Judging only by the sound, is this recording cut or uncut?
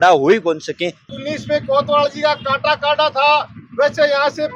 cut